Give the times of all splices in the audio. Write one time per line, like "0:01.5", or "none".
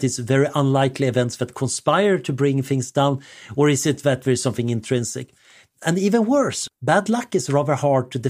0:06.7